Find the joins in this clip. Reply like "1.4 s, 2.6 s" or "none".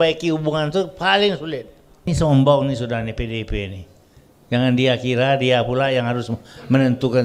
2.1 s